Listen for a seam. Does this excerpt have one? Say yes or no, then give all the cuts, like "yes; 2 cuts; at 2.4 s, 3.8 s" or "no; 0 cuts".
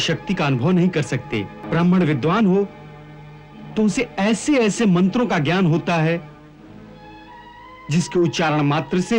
yes; 1 cut; at 1.6 s